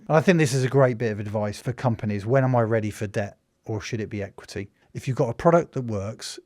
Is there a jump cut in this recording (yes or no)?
yes